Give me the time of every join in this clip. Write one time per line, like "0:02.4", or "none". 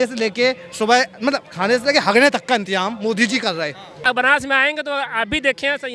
0:04.0